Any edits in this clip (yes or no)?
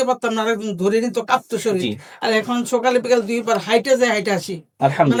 no